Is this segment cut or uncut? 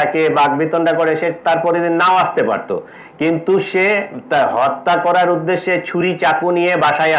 uncut